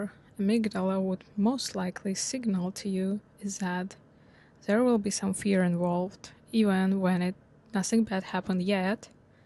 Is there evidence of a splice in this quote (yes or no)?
no